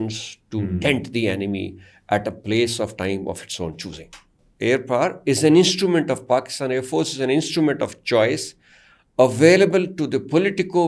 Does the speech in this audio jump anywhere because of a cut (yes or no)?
yes